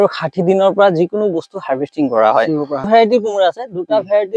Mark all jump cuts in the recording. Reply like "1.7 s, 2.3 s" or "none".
2.9 s